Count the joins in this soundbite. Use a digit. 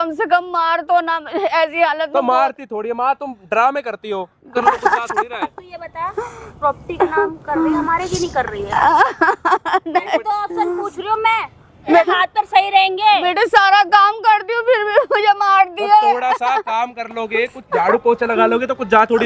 2